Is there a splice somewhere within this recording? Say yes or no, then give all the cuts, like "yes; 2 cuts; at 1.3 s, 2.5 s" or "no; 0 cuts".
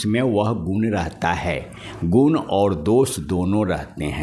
no; 0 cuts